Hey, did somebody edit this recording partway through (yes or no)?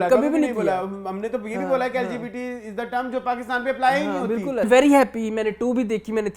yes